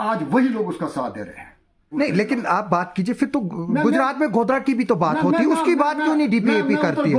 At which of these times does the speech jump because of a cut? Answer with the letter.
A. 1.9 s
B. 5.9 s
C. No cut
A